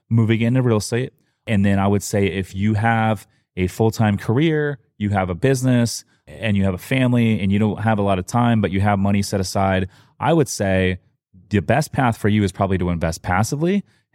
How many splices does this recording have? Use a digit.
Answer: 1